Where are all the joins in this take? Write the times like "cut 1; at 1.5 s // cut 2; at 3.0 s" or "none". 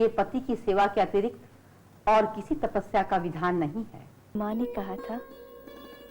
cut 1; at 4.4 s